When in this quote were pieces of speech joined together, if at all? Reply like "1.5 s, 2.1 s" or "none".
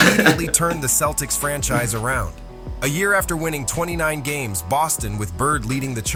none